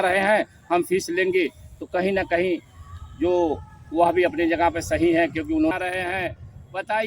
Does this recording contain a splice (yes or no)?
yes